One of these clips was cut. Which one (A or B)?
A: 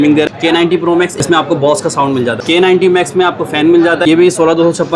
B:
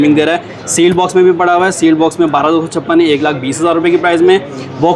A